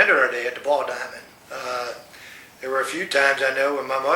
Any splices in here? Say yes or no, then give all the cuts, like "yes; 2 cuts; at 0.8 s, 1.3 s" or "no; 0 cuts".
yes; 1 cut; at 0.9 s